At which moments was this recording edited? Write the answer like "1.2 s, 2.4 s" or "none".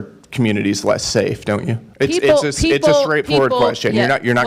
1.8 s